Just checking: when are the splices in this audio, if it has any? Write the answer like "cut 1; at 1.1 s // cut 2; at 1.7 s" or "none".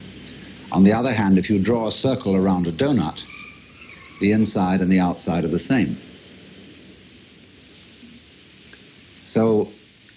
none